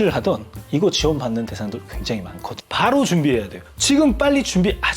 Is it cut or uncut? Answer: cut